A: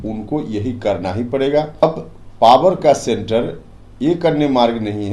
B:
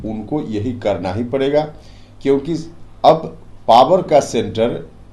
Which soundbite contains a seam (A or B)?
A